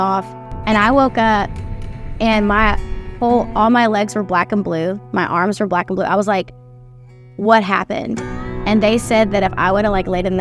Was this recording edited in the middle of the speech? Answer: yes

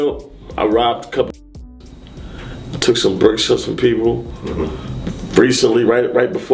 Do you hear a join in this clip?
no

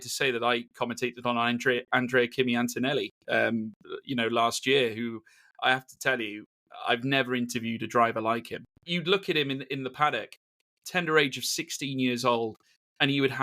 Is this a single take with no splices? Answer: no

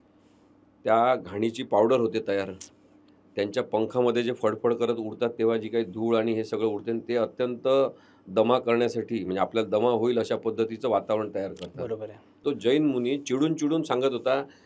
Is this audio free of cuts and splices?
no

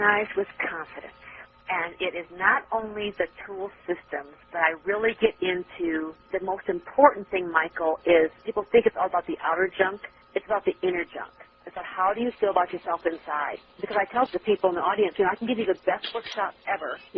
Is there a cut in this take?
yes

